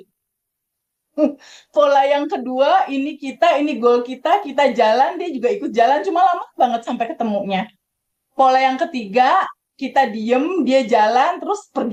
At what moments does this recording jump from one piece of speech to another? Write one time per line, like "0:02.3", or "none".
none

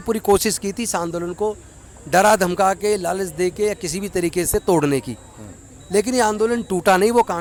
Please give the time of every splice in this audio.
none

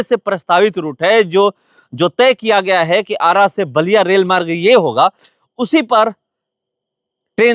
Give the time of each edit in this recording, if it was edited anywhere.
none

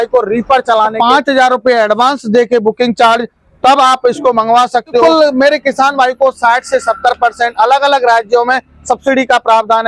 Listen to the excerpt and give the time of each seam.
0:00.9
0:05.0

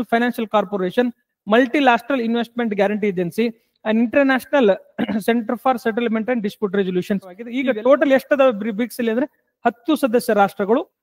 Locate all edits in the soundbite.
0:07.5

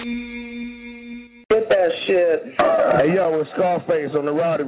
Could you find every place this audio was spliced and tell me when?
0:01.3

